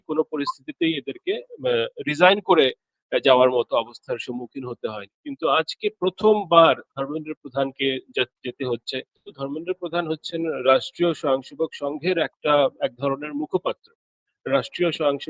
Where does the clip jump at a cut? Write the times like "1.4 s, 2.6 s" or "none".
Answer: 9.2 s